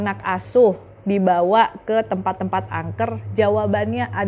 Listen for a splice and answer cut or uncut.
uncut